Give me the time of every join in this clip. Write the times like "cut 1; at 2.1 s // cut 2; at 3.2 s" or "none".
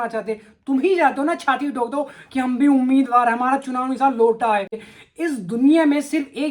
cut 1; at 4.7 s